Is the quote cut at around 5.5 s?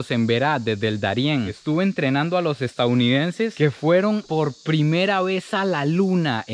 no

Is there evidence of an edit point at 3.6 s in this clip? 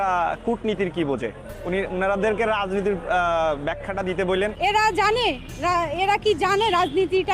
no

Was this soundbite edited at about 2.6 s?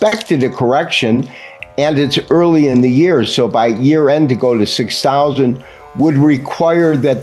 no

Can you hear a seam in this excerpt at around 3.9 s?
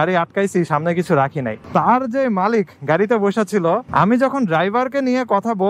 yes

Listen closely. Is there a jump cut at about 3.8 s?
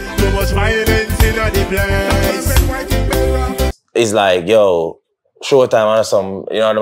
yes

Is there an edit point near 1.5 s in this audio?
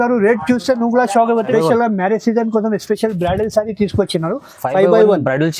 yes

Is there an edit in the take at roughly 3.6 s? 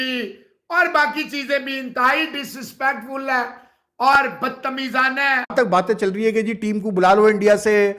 no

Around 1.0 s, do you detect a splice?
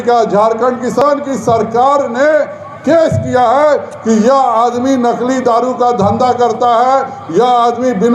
yes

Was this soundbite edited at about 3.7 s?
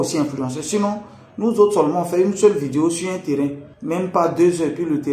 yes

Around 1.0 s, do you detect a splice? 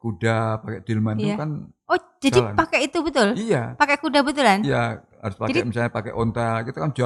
no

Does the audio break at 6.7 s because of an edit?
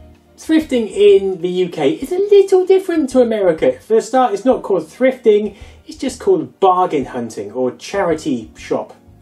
yes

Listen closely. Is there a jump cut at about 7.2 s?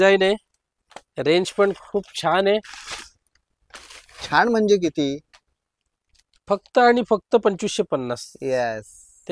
no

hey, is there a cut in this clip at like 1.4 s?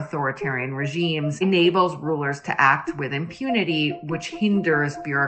yes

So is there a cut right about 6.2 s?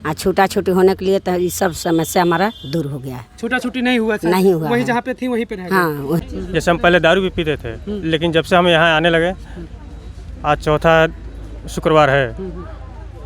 yes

